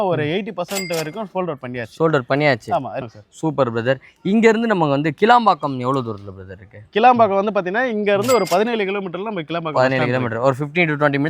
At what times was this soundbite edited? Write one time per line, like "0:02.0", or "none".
0:03.0